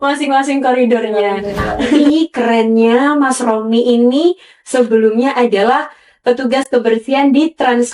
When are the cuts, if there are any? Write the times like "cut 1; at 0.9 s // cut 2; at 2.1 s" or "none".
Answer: cut 1; at 2.0 s